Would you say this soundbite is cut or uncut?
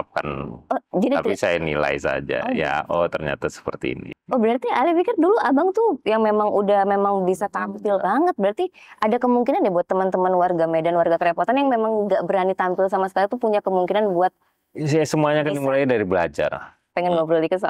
cut